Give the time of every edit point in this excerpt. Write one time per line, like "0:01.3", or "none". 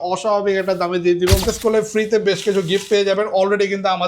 0:01.4